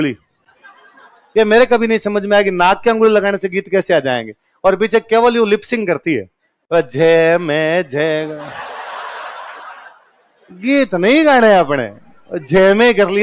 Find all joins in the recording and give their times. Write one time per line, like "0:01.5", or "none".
none